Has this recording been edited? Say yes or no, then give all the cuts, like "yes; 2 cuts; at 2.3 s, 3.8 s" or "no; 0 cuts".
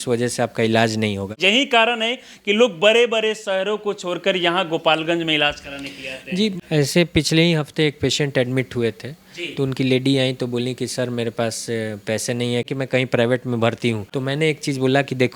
yes; 4 cuts; at 1.4 s, 6.6 s, 12.7 s, 14.1 s